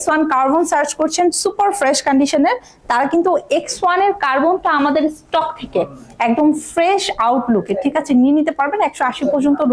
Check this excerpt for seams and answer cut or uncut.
uncut